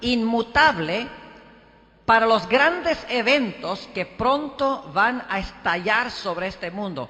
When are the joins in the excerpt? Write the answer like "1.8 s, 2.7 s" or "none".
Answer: 2.7 s